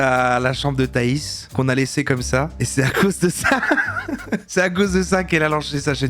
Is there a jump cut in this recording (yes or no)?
yes